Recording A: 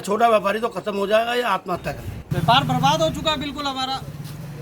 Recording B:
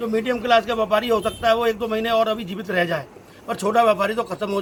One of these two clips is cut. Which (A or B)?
A